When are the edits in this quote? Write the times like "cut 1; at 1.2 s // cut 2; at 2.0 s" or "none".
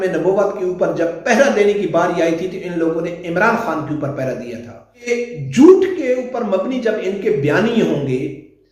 cut 1; at 5.1 s